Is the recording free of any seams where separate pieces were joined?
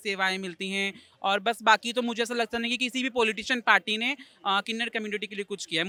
yes; 0 cuts

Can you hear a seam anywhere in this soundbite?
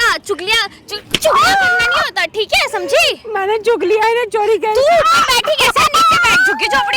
no; 0 cuts

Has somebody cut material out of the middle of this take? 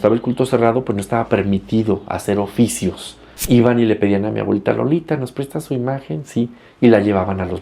yes; 1 cut; at 3.4 s

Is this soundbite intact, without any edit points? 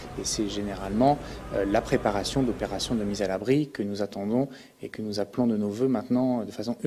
yes; 0 cuts

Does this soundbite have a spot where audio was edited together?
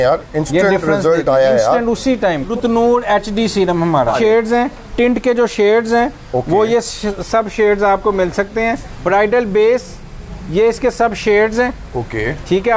yes; 3 cuts; at 2.5 s, 4.1 s, 8.9 s

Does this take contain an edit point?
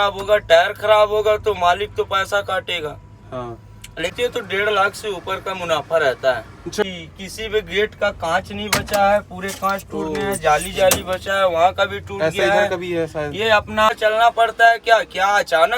yes; 3 cuts; at 4.1 s, 6.8 s, 13.9 s

